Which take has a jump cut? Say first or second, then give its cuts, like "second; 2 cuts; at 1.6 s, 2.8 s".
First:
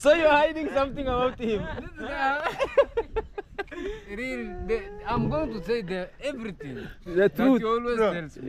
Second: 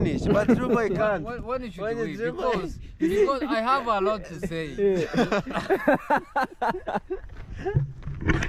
first; 1 cut; at 4.2 s